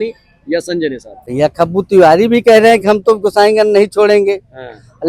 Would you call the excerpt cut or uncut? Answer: cut